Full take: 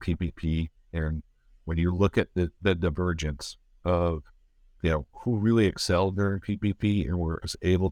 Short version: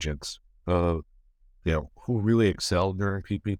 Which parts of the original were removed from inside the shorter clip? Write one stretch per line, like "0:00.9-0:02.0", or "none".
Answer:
none

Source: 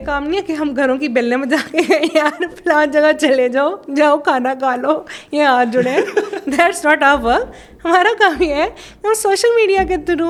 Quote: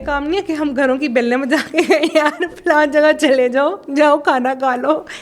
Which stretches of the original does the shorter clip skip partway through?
none

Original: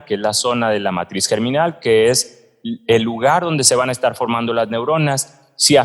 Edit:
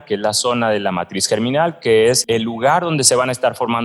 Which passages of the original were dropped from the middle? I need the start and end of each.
0:02.2-0:02.8

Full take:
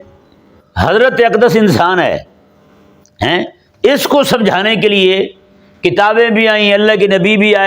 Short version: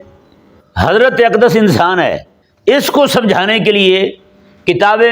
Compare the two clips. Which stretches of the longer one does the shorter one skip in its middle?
0:02.4-0:03.6

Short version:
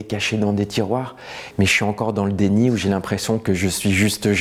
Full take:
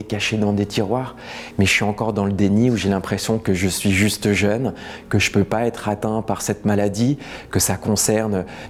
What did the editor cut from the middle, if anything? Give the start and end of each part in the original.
none

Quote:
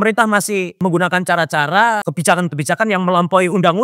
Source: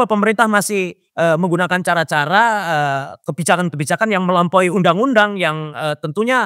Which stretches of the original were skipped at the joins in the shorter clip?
0:01.0-0:01.4
0:02.6-0:03.2

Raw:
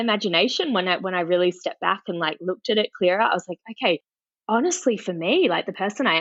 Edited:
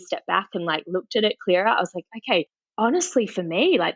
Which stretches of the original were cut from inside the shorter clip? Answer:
0:04.1-0:04.3

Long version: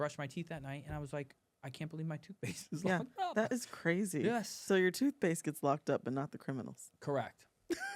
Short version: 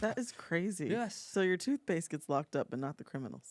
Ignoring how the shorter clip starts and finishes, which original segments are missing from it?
none

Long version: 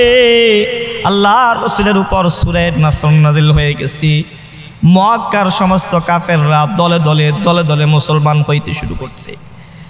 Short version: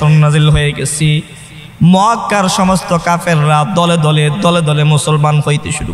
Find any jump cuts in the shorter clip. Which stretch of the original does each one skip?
none

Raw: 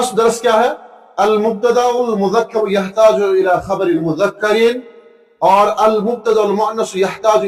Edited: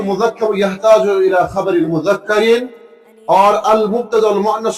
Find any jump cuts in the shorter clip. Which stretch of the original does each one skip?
none

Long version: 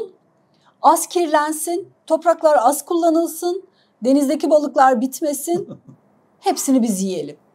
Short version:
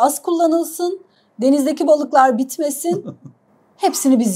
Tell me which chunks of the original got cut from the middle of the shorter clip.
none

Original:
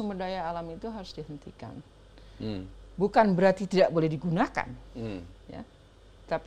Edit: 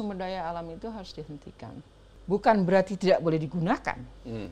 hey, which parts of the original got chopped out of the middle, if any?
0:02.1-0:02.8

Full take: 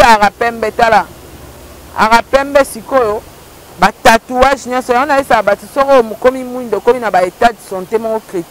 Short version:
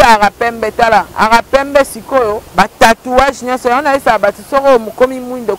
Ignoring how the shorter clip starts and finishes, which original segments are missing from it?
0:01.1-0:01.9
0:03.2-0:03.7

